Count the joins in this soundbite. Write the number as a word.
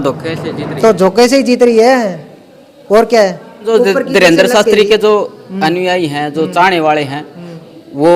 one